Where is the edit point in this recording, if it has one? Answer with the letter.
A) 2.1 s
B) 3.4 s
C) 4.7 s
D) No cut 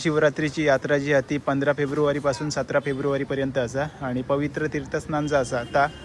D